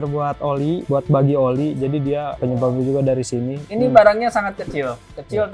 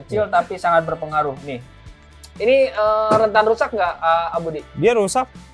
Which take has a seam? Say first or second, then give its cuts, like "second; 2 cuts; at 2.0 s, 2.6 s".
first; 3 cuts; at 0.8 s, 2.4 s, 3.6 s